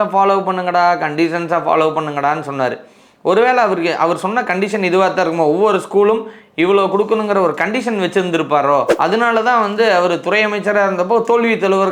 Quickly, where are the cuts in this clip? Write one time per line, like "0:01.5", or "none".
none